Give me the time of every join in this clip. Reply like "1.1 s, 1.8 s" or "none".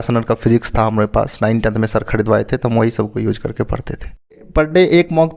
4.4 s

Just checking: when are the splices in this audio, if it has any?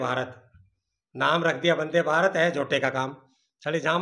none

